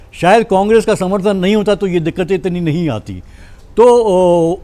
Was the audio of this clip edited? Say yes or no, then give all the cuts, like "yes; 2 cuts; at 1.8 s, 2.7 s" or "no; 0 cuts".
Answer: no; 0 cuts